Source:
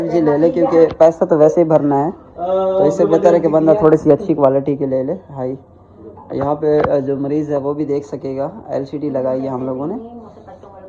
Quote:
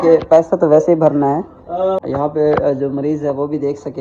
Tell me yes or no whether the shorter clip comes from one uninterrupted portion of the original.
no